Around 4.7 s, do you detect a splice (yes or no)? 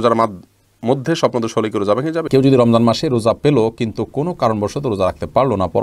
no